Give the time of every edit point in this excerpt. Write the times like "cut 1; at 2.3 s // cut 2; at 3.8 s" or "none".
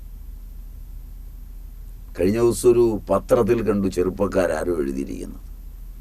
cut 1; at 2.1 s